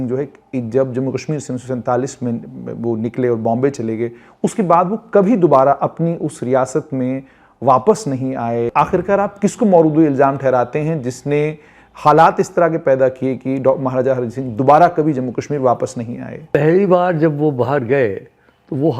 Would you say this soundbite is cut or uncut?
cut